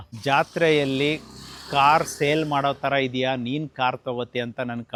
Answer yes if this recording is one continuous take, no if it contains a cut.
yes